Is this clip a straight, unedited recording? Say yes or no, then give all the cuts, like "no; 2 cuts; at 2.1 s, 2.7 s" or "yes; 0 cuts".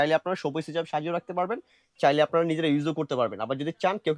yes; 0 cuts